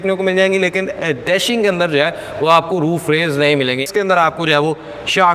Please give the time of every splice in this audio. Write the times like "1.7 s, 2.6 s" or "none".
3.9 s